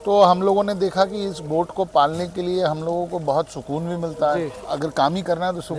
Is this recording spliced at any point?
yes; 1 cut; at 4.6 s

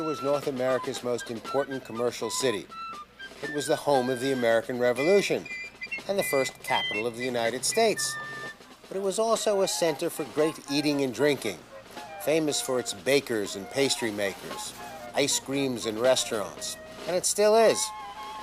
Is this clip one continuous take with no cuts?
no; 1 cut; at 13.9 s

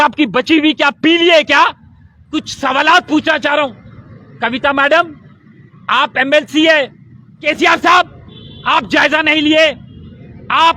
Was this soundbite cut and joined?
yes; 2 cuts; at 2.3 s, 7.4 s

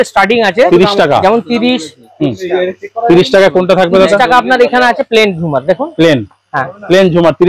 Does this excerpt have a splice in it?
no; 0 cuts

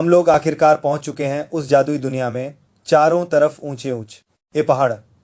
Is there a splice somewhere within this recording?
no; 0 cuts

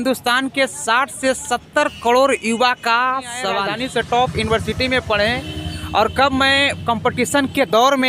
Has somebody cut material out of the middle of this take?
yes; 1 cut; at 3.6 s

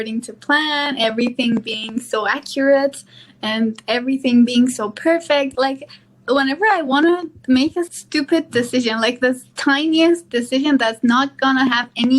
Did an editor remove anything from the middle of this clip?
yes; 2 cuts; at 5.5 s, 8.0 s

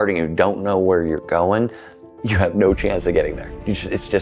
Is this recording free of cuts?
yes; 0 cuts

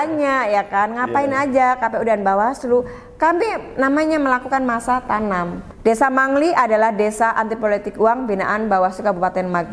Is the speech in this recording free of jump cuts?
no; 1 cut; at 5.6 s

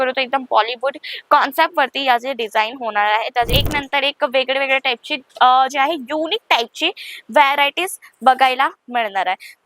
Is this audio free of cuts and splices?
no; 1 cut; at 3.5 s

